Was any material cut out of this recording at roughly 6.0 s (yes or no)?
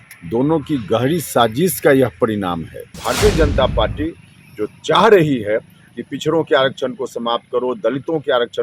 no